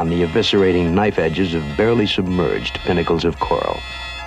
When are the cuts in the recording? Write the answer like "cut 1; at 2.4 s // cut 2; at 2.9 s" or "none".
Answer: cut 1; at 2.3 s